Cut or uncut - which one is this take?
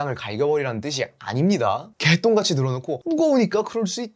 cut